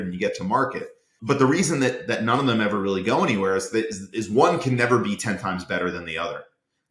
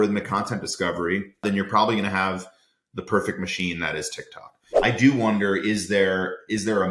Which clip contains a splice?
second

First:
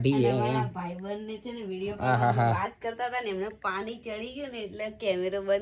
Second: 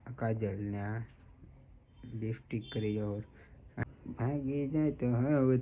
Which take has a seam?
second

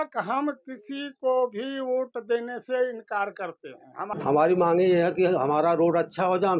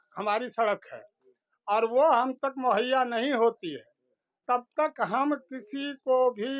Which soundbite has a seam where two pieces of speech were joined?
first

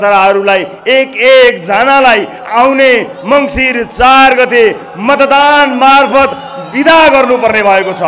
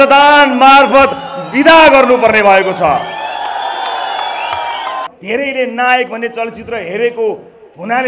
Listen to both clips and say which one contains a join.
second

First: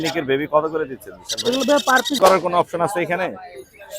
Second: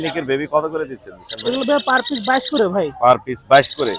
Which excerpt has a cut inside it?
first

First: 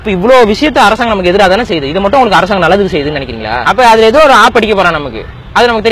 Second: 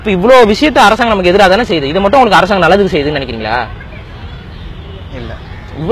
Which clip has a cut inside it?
first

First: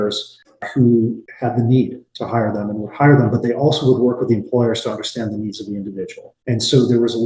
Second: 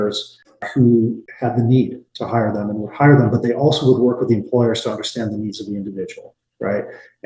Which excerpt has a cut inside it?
first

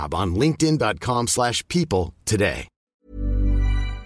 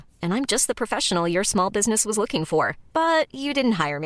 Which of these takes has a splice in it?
first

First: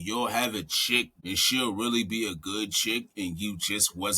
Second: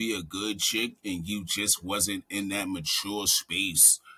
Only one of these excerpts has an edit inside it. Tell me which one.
first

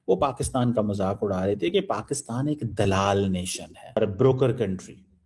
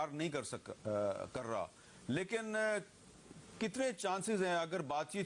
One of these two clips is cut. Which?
first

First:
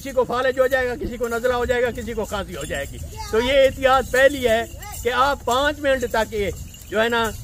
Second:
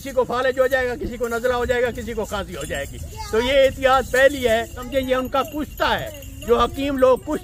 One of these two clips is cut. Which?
second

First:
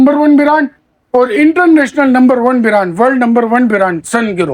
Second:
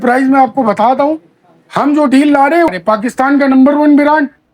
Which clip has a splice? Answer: second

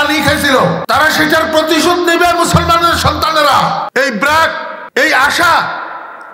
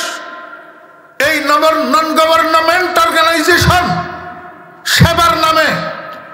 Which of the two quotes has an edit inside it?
first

